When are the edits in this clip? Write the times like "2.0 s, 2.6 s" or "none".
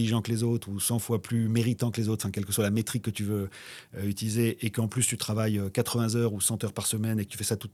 none

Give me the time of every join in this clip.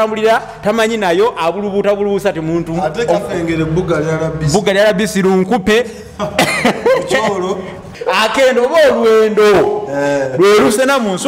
7.9 s

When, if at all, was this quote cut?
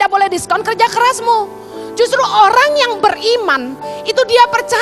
none

